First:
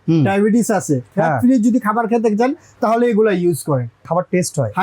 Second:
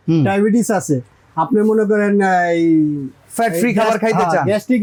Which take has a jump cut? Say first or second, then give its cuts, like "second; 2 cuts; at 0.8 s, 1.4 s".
first; 2 cuts; at 1.1 s, 4.0 s